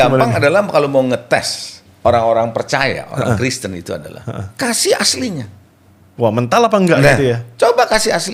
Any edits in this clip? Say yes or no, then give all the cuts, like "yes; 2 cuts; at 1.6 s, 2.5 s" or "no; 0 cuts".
no; 0 cuts